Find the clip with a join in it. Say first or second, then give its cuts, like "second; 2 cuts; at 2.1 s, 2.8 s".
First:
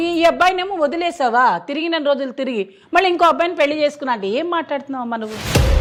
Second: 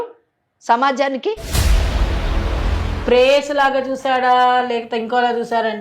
second; 1 cut; at 2.9 s